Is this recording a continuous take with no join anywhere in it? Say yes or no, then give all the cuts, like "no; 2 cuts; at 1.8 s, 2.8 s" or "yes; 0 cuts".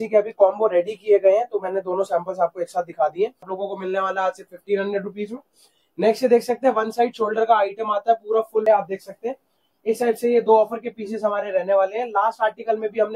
no; 2 cuts; at 3.6 s, 8.6 s